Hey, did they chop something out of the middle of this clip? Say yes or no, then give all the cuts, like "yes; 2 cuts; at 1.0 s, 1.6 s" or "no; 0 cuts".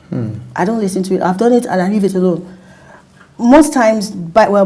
no; 0 cuts